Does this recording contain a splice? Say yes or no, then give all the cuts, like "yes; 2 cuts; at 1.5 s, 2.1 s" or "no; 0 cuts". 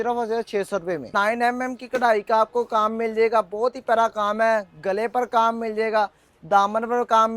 yes; 1 cut; at 1.1 s